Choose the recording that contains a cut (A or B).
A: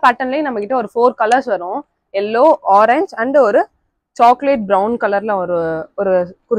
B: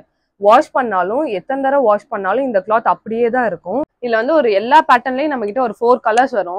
B